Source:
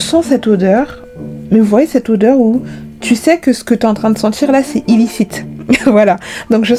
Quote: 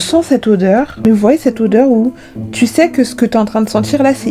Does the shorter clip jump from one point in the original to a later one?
yes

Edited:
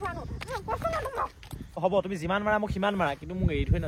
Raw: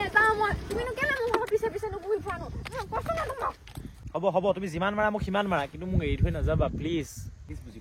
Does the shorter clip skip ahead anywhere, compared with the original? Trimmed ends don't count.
yes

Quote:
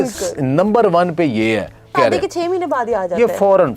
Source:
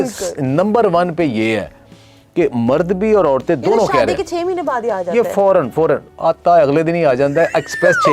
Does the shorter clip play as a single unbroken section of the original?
no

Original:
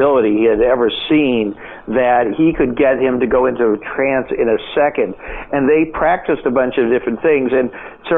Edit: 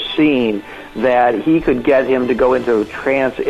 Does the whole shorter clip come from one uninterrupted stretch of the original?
yes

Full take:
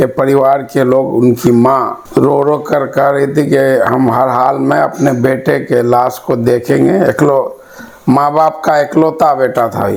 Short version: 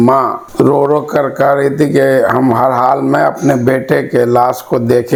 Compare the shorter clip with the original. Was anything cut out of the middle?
no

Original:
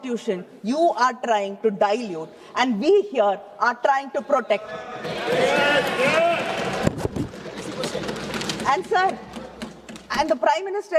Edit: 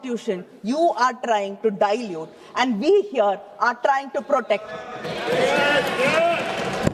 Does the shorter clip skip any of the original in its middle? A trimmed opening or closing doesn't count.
no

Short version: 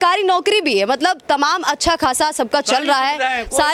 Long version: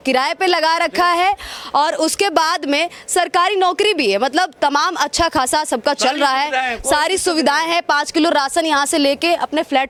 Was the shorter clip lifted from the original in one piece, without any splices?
yes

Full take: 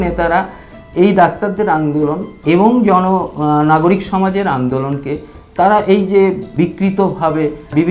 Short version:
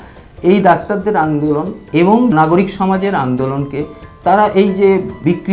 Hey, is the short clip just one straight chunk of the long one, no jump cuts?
no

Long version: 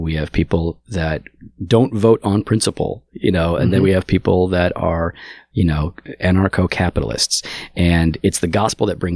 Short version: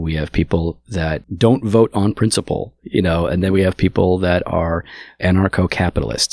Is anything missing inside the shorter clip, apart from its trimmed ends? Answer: yes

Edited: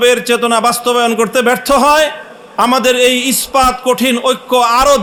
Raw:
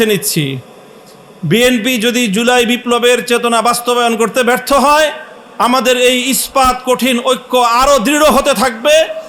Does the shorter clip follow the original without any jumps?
yes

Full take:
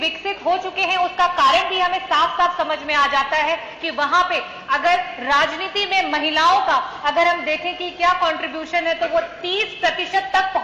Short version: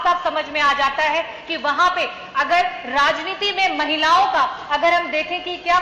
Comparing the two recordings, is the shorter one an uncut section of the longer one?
yes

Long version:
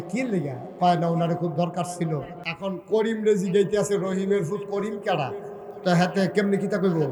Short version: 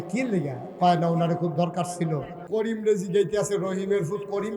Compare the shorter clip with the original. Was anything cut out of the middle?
yes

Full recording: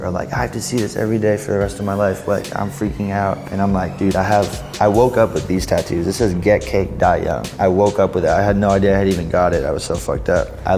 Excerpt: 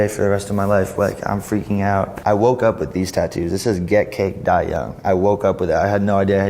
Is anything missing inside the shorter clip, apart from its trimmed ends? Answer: yes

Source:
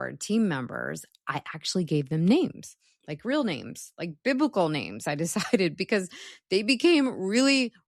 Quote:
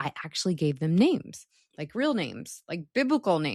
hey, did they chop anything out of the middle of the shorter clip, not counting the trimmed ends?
no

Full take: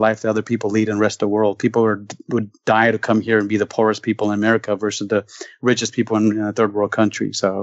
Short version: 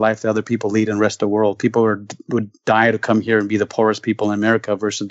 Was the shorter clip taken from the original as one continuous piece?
yes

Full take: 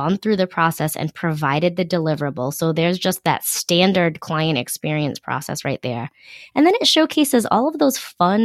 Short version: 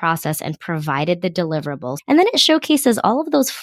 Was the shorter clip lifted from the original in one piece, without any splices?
no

